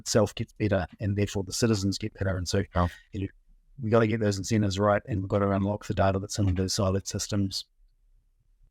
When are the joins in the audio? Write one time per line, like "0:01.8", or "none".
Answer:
none